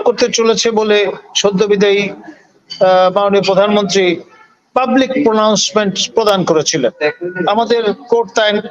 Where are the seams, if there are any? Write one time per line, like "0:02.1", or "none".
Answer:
0:07.0